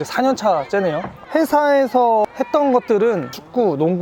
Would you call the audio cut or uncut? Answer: uncut